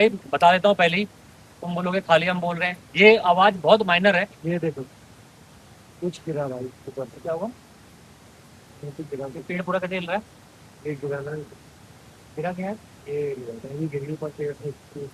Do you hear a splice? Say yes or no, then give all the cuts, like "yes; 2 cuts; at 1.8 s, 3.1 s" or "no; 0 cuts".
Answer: no; 0 cuts